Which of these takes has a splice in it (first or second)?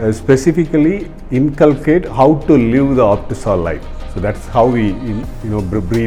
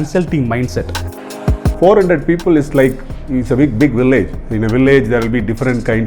second